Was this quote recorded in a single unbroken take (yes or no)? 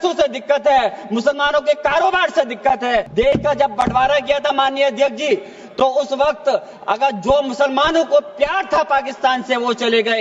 no